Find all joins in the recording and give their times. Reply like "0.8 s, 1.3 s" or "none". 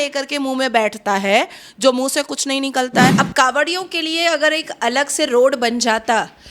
3.1 s

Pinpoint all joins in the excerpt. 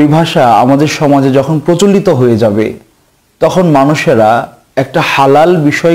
4.6 s

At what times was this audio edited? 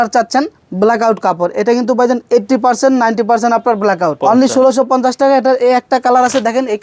4.2 s

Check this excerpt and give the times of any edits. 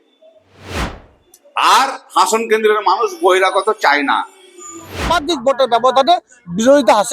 5.1 s

